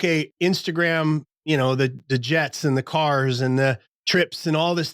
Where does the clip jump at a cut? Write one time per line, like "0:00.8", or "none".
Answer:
0:01.3
0:03.9